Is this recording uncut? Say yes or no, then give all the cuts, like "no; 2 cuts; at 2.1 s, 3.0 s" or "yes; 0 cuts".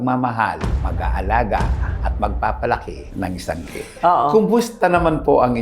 no; 1 cut; at 4.7 s